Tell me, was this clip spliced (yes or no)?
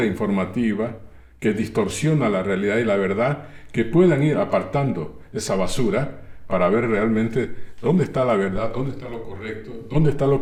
no